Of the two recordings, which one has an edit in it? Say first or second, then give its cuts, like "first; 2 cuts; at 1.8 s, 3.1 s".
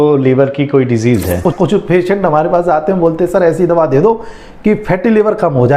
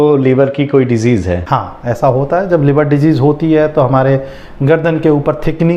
first; 1 cut; at 1.5 s